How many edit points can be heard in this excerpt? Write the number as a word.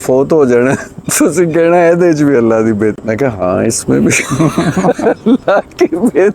one